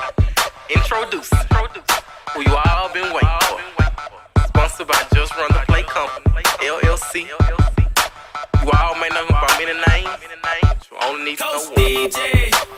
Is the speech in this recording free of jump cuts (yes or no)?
yes